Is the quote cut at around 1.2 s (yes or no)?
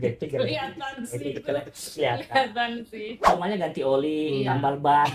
no